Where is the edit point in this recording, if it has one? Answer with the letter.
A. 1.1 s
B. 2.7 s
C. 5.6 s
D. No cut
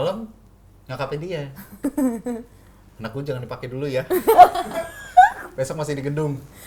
D